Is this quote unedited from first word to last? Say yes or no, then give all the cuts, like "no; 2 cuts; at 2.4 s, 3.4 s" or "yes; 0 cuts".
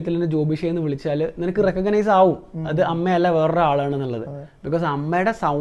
yes; 0 cuts